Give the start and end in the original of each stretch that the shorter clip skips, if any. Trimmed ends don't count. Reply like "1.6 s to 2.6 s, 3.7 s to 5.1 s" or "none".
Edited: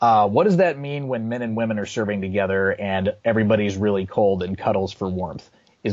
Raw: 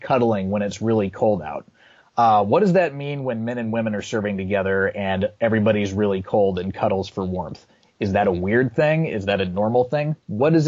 none